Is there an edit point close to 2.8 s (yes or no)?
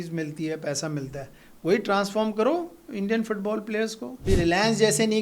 no